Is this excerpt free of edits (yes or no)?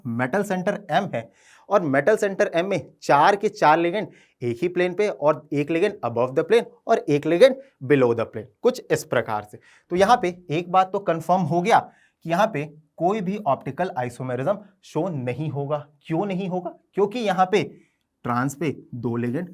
yes